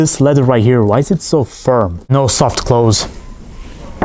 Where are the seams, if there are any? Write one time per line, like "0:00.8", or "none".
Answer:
0:02.1

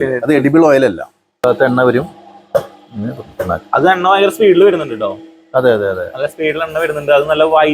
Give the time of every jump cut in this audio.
0:01.4

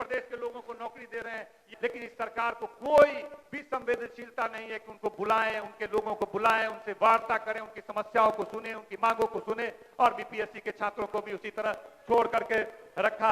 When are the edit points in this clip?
0:01.7

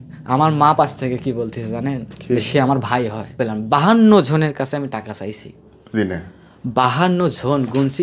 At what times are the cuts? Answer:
0:03.4

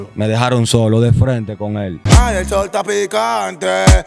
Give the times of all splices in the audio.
0:01.9

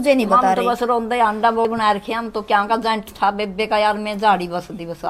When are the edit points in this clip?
0:01.6

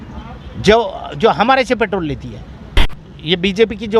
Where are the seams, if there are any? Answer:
0:02.8

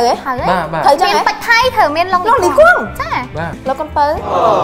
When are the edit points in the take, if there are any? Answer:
0:03.5

